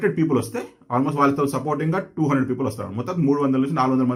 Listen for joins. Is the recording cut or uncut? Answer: uncut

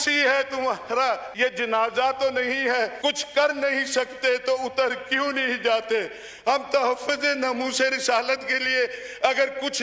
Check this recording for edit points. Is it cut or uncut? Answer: cut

